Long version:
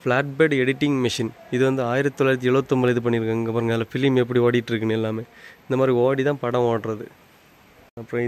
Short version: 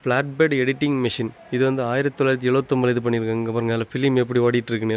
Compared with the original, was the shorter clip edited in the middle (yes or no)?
no